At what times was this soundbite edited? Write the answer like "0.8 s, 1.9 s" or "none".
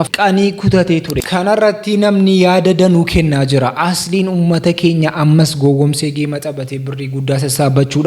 1.2 s

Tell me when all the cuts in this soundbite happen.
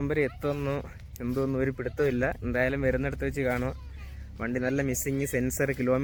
none

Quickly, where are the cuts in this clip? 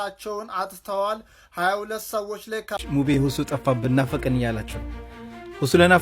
2.8 s

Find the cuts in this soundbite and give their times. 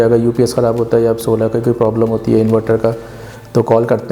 none

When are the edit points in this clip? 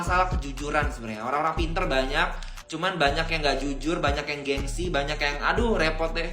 none

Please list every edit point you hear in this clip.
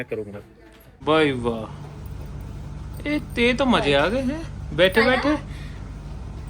0.9 s

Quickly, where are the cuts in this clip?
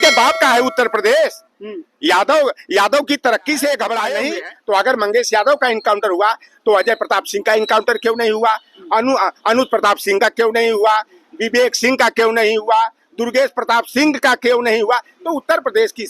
4.3 s

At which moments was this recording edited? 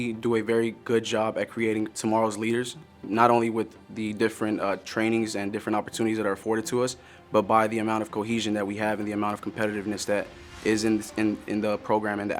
none

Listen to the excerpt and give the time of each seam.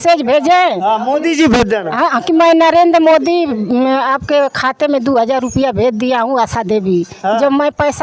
none

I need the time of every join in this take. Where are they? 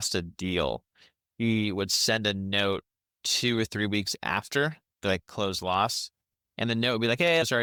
none

